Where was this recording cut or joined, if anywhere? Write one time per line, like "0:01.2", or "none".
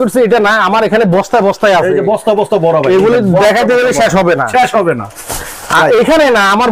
none